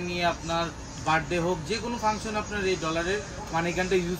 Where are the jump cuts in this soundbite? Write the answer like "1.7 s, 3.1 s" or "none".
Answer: none